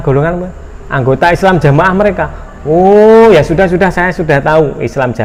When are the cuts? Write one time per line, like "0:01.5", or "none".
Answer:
none

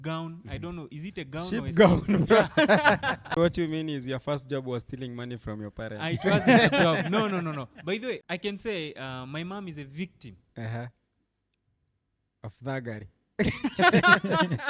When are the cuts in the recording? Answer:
0:03.3
0:08.2

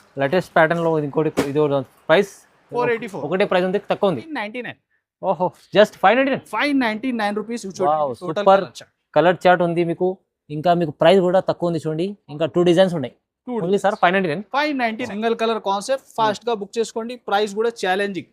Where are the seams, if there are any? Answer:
0:04.3
0:15.1

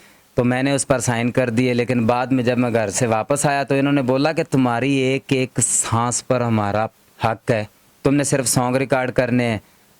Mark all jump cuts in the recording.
0:07.9

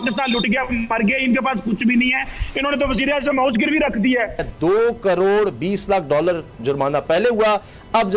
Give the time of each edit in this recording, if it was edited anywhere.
0:04.5

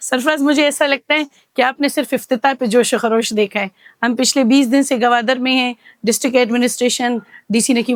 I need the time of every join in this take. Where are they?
none

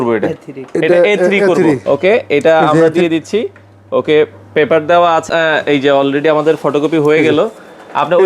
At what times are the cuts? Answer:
0:01.8
0:05.3

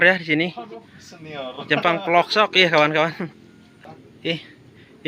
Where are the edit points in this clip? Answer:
0:04.0

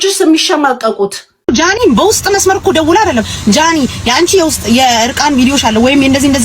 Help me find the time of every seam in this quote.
0:01.4

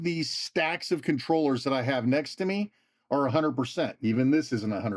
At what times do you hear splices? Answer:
0:04.0

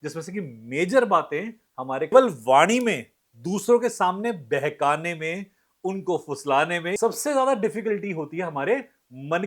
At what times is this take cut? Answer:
0:02.1
0:07.0

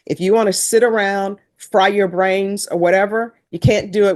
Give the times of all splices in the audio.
none

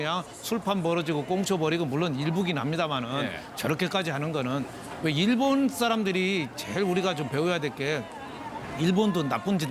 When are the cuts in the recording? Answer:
0:07.6

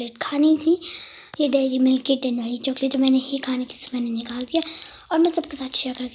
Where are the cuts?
none

